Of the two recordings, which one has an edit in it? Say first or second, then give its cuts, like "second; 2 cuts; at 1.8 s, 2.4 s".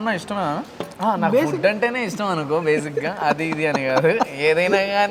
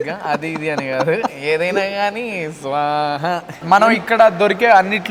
second; 1 cut; at 3.5 s